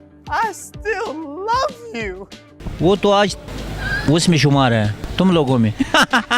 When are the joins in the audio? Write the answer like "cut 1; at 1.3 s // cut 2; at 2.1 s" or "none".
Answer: cut 1; at 5.0 s